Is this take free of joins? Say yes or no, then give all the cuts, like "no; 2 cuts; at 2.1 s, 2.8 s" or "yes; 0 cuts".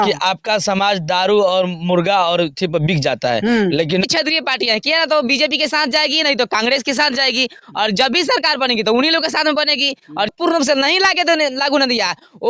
no; 2 cuts; at 4.0 s, 10.3 s